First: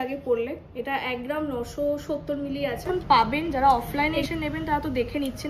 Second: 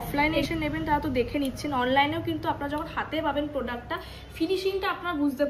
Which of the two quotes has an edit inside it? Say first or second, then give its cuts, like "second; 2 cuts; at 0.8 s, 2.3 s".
first; 1 cut; at 2.9 s